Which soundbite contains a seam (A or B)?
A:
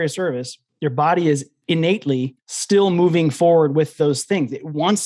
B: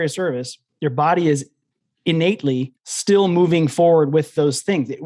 A